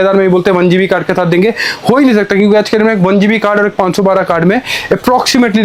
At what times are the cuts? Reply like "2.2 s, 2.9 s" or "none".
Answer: none